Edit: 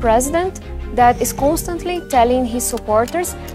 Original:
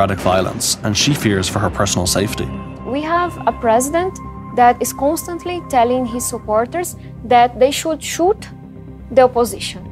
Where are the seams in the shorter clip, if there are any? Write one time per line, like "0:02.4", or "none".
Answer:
none